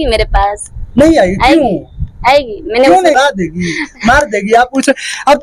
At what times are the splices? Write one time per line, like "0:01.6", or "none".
0:03.2